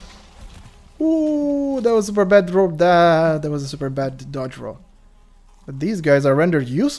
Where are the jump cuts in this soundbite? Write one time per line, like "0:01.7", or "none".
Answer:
none